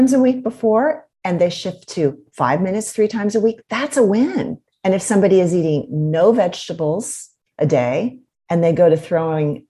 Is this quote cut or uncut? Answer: cut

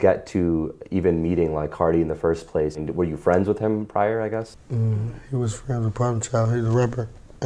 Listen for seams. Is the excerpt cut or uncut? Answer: cut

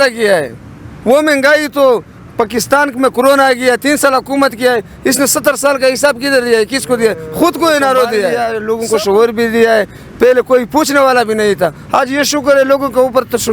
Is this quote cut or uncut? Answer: cut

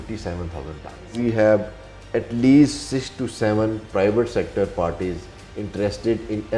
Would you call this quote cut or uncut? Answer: cut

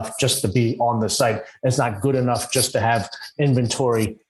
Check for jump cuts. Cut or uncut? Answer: uncut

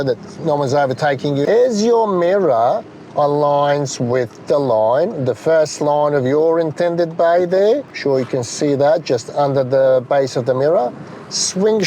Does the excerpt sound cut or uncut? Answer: cut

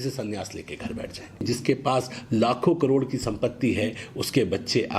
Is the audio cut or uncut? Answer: cut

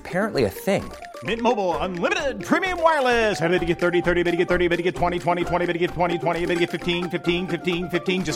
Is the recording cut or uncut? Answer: uncut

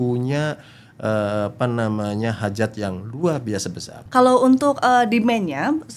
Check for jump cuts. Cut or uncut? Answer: cut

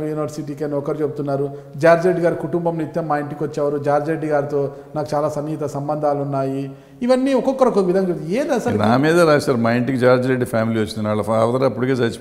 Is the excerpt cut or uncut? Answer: uncut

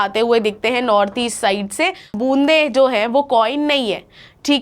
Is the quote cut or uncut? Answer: cut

